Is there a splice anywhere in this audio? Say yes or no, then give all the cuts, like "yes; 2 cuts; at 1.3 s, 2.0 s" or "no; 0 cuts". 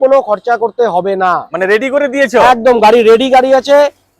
no; 0 cuts